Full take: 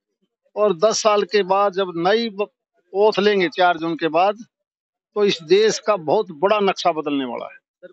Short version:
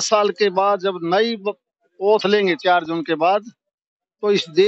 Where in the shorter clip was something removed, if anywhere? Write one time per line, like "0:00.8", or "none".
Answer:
none

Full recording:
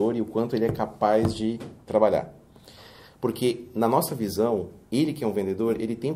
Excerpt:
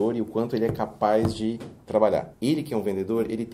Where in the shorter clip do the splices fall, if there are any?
0:02.3

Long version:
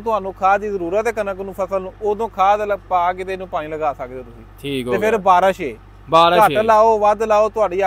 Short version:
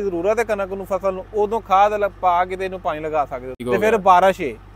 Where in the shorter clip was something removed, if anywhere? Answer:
0:03.6

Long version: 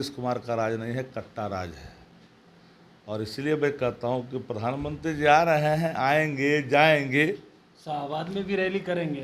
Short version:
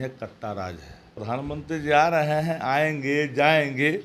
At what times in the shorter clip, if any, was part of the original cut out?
0:01.2

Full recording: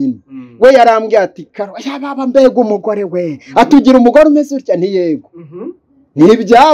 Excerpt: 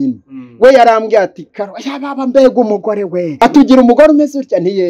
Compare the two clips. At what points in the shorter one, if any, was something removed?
0:03.3

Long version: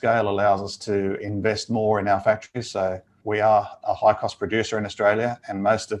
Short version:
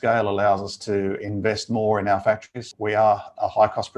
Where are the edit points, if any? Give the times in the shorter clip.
0:02.6

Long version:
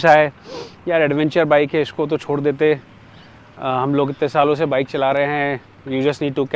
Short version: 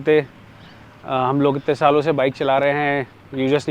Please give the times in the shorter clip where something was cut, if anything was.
none

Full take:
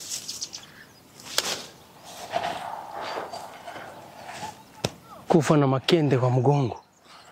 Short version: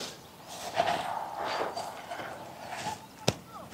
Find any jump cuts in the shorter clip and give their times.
none

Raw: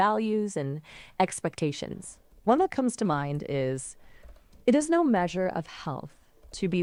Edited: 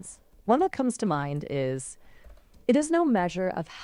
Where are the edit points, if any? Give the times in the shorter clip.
none

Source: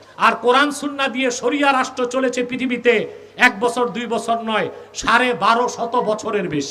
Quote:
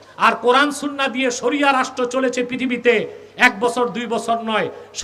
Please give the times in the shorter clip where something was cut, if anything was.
none

